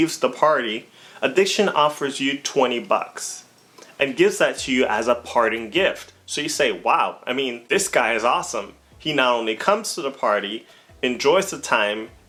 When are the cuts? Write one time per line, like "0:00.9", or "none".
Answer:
none